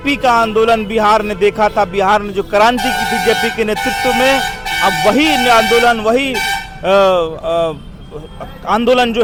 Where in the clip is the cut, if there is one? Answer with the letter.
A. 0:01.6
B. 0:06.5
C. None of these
C